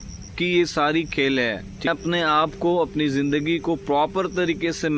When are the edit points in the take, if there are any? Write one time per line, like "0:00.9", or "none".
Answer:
none